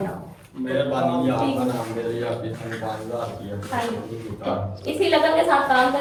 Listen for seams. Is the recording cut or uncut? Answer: uncut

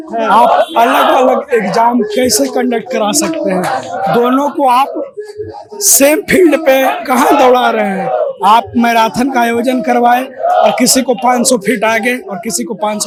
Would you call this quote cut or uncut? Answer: uncut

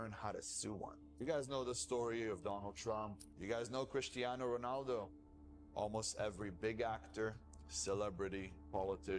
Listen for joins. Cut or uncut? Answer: cut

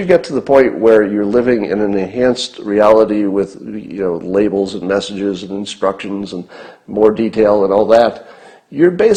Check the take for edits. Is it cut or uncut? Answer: uncut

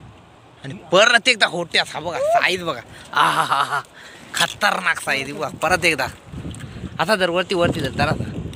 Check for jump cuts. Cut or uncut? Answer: uncut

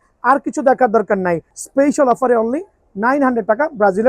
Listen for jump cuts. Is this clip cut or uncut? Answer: cut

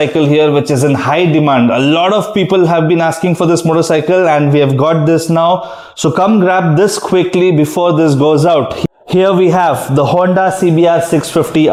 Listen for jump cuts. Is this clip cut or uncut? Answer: uncut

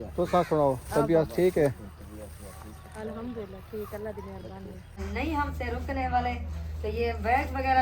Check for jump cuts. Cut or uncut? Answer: cut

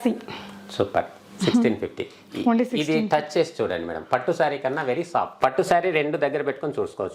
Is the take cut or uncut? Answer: uncut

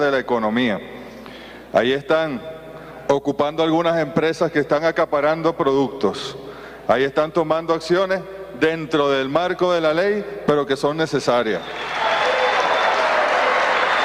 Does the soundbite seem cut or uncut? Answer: cut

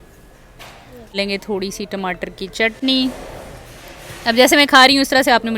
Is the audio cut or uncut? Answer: cut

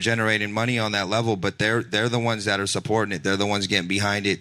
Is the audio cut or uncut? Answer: uncut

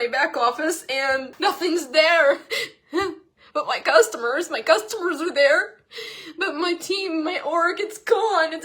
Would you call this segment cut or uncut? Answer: cut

